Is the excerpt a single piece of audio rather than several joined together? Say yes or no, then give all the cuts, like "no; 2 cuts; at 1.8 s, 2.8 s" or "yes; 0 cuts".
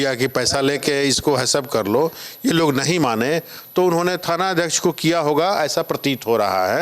yes; 0 cuts